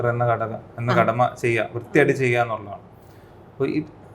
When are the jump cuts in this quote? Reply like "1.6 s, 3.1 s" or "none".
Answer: none